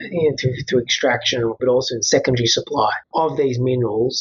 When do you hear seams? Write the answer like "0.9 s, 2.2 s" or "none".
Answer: 1.6 s